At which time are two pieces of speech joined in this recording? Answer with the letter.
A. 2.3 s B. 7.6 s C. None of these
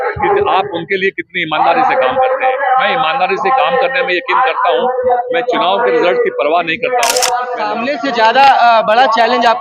B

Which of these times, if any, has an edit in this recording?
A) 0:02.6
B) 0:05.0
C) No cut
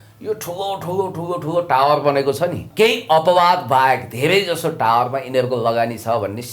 A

